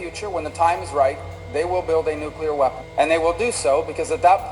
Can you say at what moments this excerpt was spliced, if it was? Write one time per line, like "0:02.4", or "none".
0:02.8